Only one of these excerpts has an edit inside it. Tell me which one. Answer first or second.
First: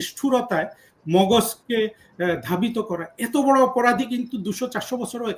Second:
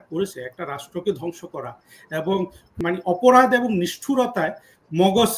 second